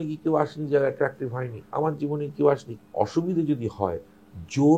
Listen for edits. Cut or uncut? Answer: cut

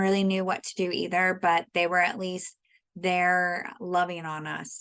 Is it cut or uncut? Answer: uncut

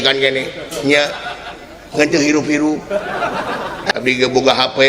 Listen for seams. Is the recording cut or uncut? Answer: cut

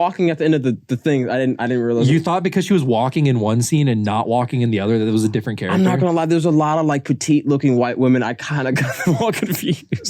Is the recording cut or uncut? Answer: uncut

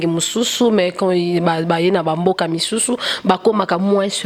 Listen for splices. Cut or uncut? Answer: uncut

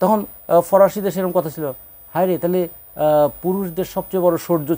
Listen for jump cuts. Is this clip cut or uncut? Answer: uncut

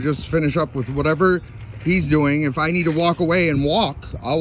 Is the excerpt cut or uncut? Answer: uncut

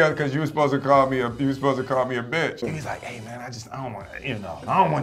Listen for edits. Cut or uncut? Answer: uncut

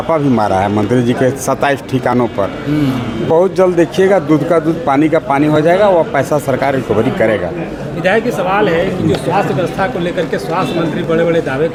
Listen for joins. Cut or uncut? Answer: uncut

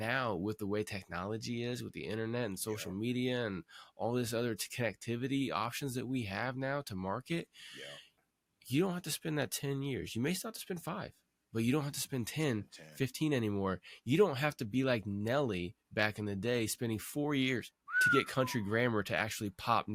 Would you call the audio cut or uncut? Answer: uncut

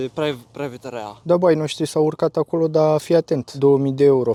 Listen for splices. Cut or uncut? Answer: uncut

